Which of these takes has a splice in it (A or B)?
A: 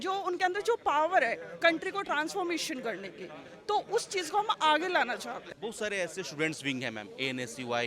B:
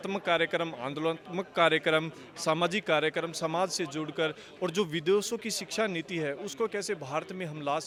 A